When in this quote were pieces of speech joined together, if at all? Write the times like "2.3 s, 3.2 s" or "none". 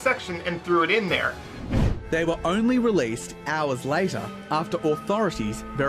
1.5 s